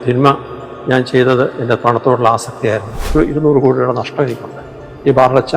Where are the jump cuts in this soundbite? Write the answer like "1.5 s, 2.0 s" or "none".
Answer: 3.1 s